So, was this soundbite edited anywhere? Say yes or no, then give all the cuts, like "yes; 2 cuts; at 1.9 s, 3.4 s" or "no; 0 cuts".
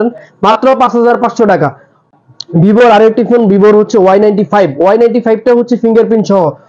no; 0 cuts